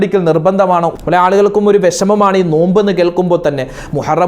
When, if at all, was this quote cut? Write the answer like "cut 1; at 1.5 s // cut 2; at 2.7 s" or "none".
cut 1; at 0.9 s

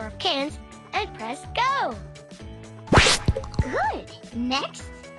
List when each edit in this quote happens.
cut 1; at 3.6 s

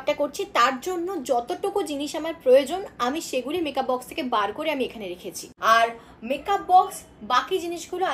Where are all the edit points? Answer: none

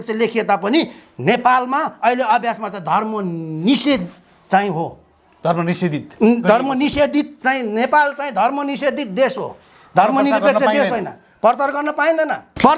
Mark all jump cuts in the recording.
none

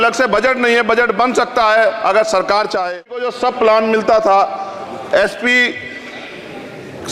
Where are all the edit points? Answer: cut 1; at 3.3 s

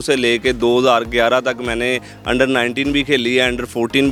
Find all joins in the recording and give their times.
none

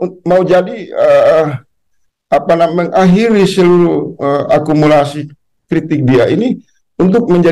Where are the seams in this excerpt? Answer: none

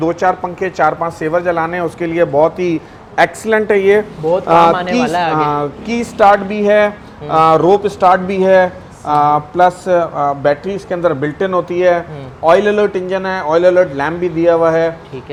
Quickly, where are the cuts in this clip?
none

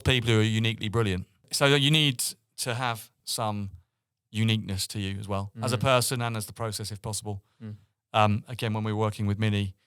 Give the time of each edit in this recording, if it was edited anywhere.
cut 1; at 1.5 s // cut 2; at 3.2 s

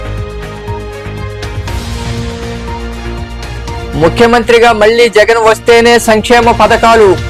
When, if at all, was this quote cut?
cut 1; at 1.5 s

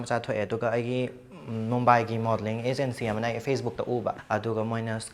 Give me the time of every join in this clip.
cut 1; at 4.2 s

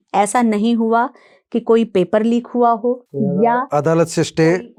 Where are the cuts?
none

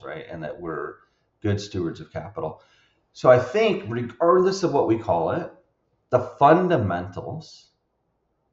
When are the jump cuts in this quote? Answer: none

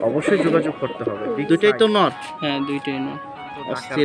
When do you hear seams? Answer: cut 1; at 1.0 s

